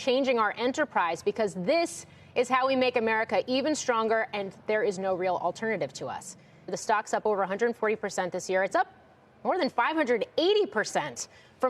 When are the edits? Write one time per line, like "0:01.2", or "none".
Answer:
0:06.7